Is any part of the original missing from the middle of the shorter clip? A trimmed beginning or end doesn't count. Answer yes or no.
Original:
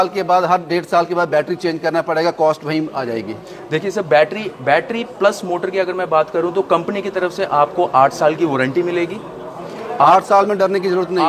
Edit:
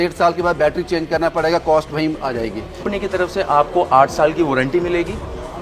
yes